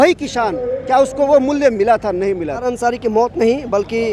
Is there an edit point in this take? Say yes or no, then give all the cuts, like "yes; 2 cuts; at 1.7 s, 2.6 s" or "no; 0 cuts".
yes; 1 cut; at 2.6 s